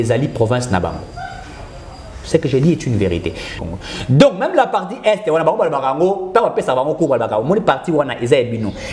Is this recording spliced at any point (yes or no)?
yes